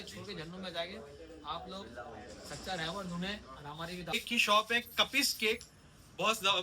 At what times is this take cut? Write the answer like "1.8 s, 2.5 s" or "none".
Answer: 4.1 s